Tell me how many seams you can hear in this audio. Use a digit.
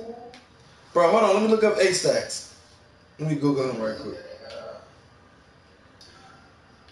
1